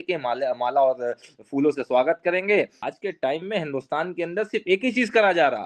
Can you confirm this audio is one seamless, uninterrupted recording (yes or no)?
no